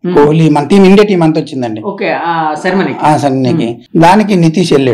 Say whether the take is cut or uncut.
cut